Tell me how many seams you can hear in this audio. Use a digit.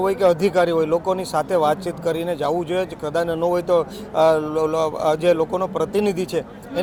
0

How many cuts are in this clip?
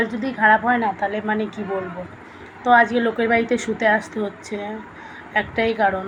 0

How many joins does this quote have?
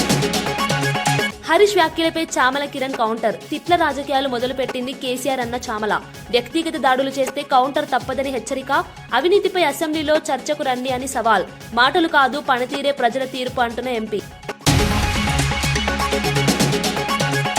1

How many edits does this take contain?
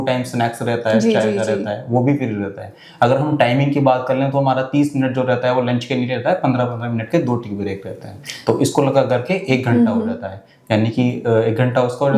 0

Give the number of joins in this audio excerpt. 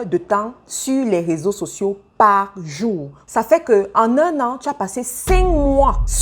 1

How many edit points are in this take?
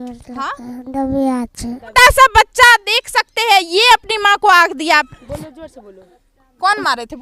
2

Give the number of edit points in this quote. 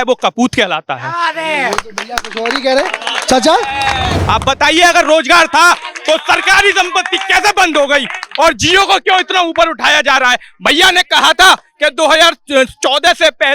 1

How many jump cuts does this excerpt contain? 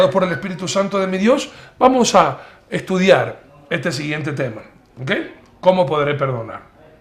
1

